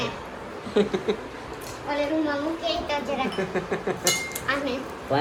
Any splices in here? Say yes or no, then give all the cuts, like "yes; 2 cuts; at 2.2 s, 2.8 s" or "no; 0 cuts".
no; 0 cuts